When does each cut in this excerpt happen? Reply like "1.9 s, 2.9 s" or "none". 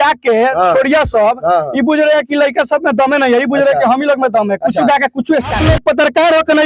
5.6 s